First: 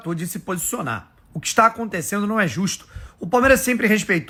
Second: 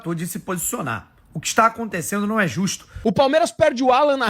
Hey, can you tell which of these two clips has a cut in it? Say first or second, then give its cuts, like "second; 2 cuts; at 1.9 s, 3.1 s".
second; 1 cut; at 2.9 s